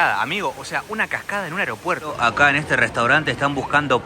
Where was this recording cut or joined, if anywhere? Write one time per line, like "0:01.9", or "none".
0:02.2